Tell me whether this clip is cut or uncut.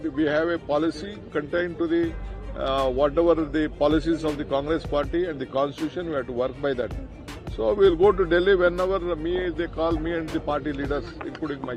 uncut